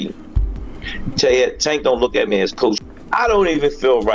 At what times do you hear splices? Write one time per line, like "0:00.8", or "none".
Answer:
0:02.8